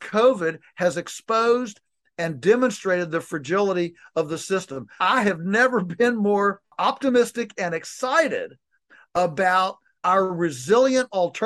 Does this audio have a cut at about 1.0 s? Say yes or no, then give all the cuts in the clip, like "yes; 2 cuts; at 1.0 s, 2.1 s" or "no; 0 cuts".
no; 3 cuts; at 5.0 s, 6.7 s, 10.0 s